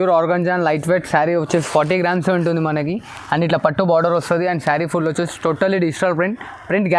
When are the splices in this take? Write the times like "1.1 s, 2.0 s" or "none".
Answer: none

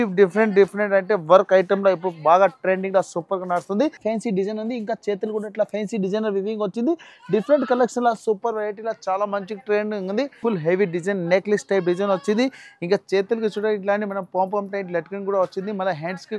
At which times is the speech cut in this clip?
4.0 s, 10.4 s

